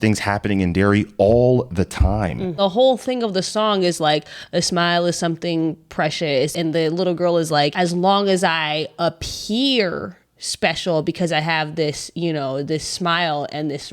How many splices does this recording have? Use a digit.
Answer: 3